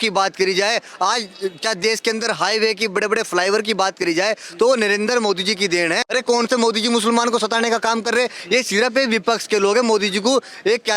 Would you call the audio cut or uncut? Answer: cut